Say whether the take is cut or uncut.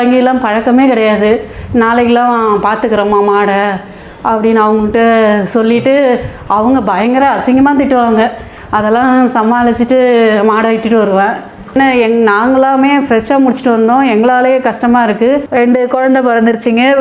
cut